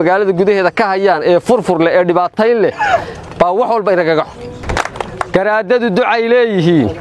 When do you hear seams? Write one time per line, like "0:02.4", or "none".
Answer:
0:04.6